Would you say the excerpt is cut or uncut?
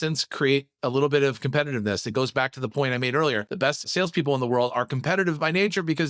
cut